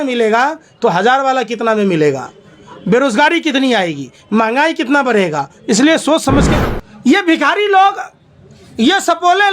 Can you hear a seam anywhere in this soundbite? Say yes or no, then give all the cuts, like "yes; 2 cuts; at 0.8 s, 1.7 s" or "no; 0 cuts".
yes; 1 cut; at 6.6 s